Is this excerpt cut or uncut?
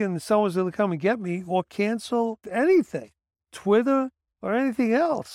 cut